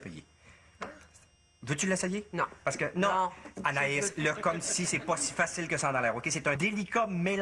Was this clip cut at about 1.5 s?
no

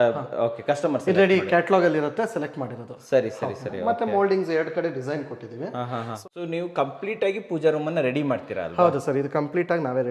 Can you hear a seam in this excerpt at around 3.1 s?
no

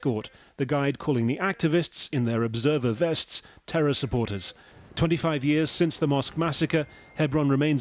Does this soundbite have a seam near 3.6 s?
no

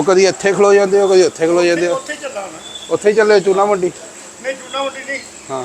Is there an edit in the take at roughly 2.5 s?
no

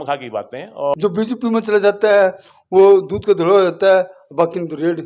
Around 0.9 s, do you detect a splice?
yes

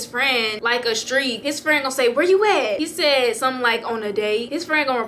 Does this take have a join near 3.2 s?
no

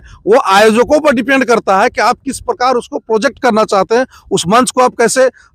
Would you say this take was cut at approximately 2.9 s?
no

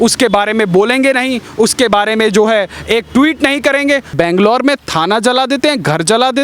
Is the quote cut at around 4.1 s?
yes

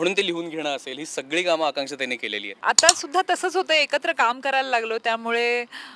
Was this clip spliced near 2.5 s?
yes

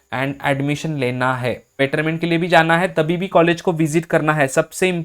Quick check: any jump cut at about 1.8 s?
yes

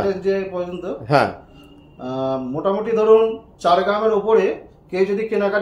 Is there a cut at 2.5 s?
no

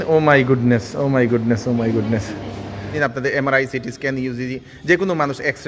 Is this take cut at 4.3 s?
no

